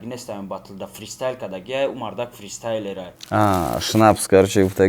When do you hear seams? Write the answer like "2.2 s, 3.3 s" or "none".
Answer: 3.1 s